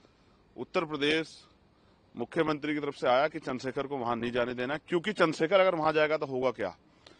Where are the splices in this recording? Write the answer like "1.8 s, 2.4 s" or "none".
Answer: none